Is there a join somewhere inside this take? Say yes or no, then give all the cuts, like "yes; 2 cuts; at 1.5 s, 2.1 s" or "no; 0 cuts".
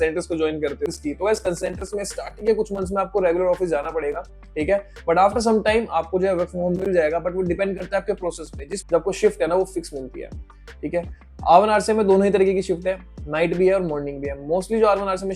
yes; 2 cuts; at 0.9 s, 8.9 s